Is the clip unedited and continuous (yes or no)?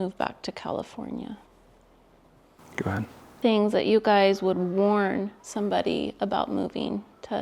no